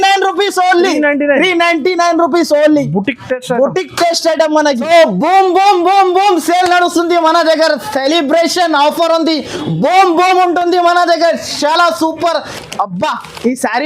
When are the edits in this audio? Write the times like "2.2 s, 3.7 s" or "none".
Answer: 4.8 s, 12.6 s

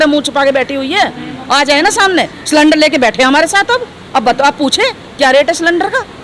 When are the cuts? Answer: none

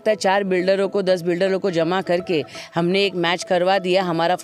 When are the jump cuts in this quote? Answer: none

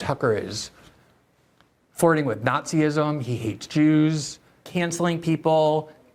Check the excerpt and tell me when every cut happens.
4.7 s

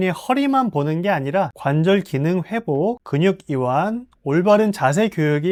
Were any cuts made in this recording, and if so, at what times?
none

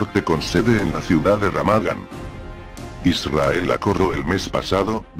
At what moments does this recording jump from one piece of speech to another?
none

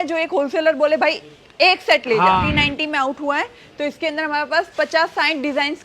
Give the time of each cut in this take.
2.4 s

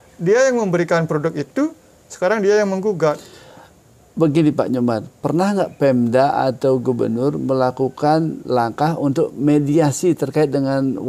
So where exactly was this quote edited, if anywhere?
none

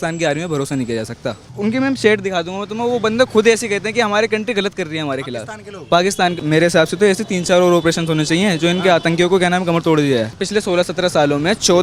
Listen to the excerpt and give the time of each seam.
1.5 s, 6.4 s, 10.4 s

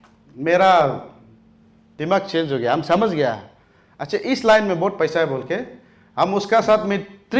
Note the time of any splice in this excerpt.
none

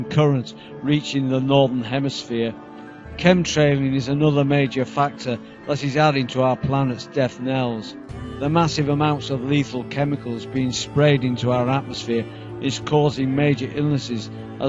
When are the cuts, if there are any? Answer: 7.4 s

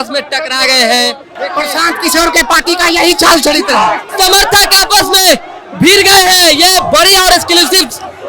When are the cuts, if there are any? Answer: 1.3 s, 4.0 s

